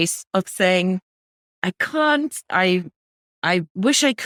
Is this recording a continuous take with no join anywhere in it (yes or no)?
yes